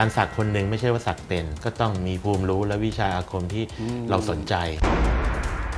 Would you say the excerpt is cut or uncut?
cut